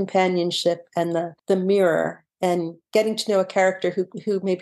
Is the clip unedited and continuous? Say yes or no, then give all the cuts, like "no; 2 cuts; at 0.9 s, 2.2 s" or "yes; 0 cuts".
no; 2 cuts; at 1.3 s, 2.8 s